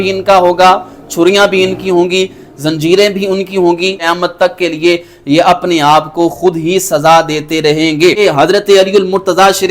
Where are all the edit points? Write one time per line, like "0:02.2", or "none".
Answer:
0:04.0
0:08.2